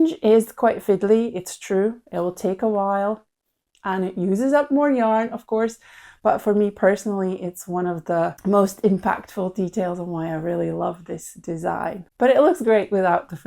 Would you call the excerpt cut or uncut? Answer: uncut